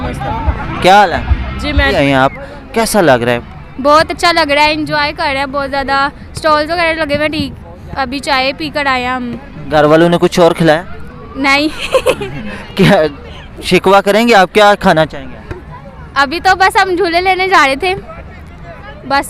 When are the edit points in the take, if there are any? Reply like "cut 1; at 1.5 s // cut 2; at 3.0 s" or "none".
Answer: cut 1; at 2.0 s